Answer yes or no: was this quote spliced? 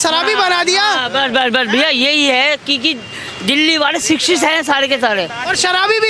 no